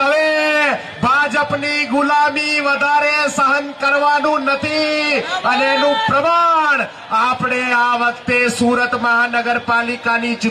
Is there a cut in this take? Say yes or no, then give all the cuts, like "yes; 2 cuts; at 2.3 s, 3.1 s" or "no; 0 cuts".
no; 0 cuts